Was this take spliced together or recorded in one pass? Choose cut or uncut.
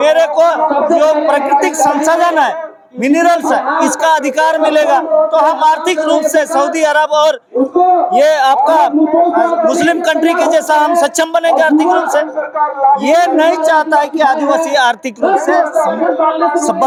uncut